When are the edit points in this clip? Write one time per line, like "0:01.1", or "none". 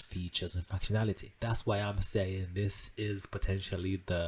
0:01.3

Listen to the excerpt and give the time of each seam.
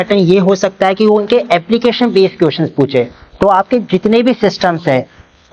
none

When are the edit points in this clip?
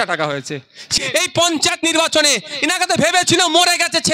0:00.9

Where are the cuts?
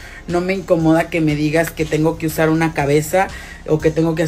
none

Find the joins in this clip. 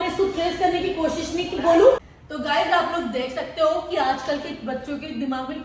0:02.0

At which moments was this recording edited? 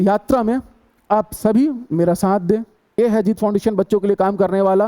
0:02.9

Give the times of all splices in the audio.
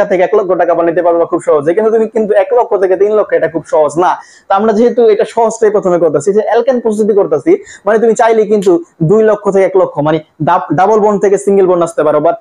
none

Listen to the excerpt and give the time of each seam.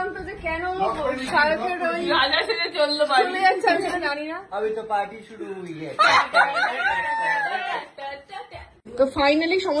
0:08.9

